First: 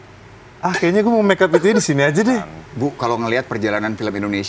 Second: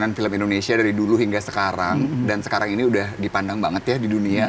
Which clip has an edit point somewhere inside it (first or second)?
first